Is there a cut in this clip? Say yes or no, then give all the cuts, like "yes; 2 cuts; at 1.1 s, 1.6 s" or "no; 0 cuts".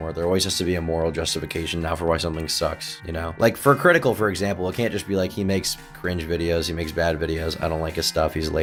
no; 0 cuts